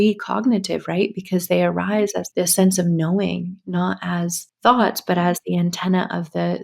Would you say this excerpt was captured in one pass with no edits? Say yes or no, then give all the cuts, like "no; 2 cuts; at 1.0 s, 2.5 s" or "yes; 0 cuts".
no; 2 cuts; at 2.2 s, 4.4 s